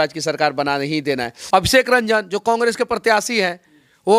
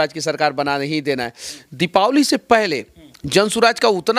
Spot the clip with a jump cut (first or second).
first